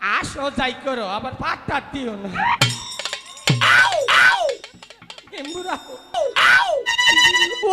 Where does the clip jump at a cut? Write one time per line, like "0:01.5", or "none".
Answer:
0:06.1